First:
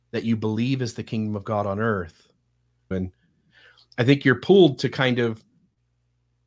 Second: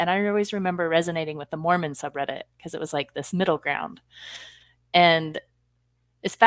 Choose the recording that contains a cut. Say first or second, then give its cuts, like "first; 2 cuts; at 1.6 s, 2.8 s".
first; 1 cut; at 2.9 s